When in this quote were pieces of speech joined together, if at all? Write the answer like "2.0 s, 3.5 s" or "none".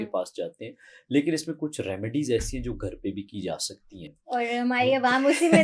none